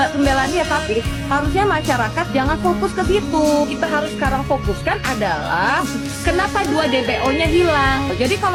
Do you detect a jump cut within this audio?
no; 0 cuts

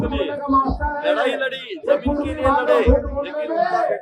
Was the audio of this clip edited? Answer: no; 0 cuts

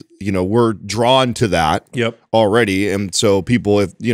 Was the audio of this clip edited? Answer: no; 0 cuts

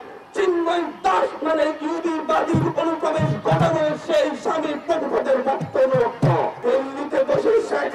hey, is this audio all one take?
no; 1 cut; at 6.5 s

